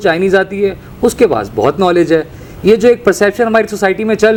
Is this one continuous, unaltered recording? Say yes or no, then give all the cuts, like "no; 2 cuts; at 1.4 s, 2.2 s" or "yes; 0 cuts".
yes; 0 cuts